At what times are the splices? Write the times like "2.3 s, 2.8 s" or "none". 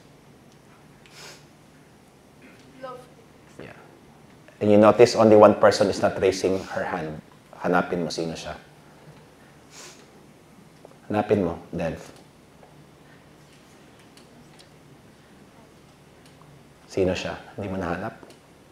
none

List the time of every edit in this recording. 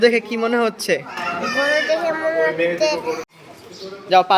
3.3 s

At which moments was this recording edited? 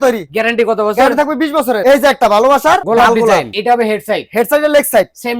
1.8 s, 3.5 s

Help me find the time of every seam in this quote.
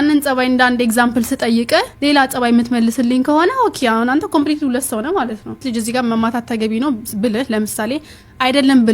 5.6 s

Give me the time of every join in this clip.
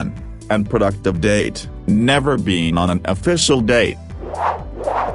4.1 s

